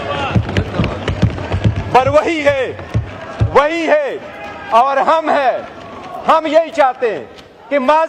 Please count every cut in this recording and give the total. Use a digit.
0